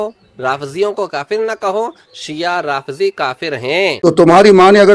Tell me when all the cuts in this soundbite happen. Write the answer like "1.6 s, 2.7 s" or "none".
3.6 s